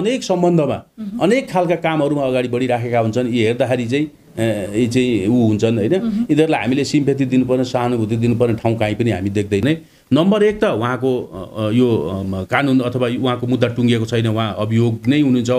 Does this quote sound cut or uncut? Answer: cut